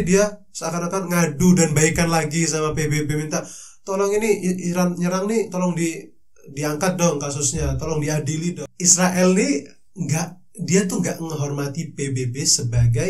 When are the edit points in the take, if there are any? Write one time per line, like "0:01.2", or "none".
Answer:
0:08.7